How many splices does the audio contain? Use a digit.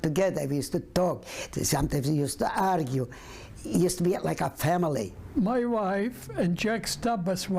1